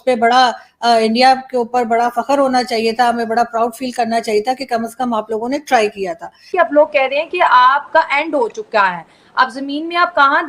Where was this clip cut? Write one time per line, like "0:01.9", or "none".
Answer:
0:06.5

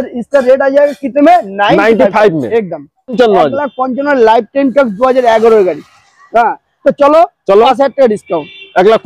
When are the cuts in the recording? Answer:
0:03.1

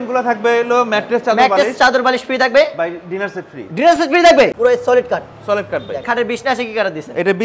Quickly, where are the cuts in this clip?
0:04.5
0:06.0

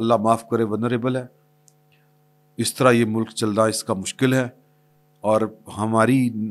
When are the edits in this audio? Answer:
none

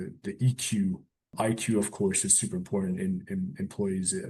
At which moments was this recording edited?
0:01.3

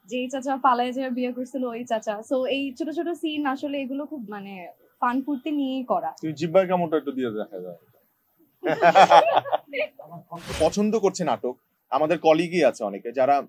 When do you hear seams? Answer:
0:10.4

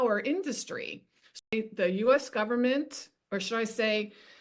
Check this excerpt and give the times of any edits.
0:01.4

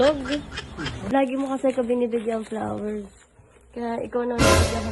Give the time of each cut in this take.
0:01.0

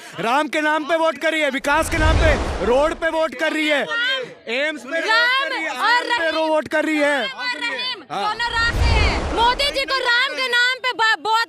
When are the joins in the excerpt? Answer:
0:09.2

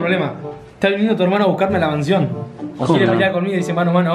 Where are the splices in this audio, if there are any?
none

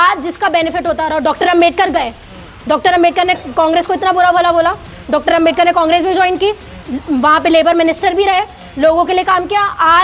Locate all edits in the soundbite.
none

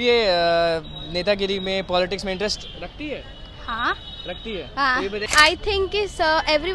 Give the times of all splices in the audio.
0:05.3

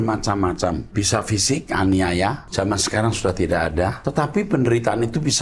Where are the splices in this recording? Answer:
0:00.8
0:02.4
0:04.0

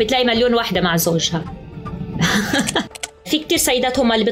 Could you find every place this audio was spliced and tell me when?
0:03.2

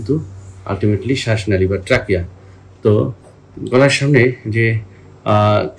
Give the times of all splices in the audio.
none

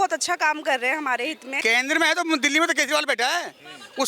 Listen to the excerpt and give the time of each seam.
0:01.5

